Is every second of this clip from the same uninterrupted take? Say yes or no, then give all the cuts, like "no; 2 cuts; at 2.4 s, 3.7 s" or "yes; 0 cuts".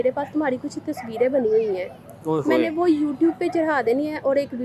yes; 0 cuts